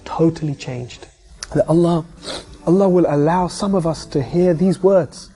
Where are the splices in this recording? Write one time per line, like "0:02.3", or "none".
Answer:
0:01.5